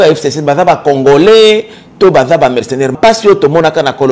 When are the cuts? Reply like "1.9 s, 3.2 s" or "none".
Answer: 2.9 s